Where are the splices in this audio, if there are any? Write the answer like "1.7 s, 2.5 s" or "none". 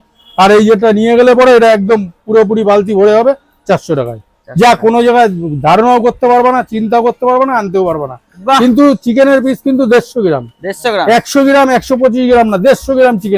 none